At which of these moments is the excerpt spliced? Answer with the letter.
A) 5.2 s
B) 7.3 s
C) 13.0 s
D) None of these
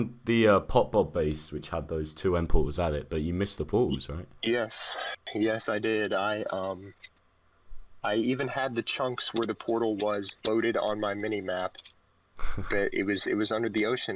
D